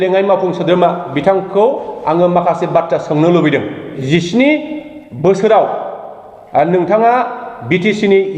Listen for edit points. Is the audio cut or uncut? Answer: cut